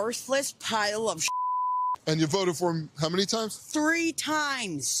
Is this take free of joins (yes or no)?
no